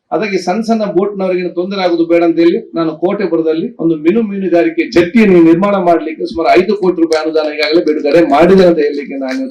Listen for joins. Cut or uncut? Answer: uncut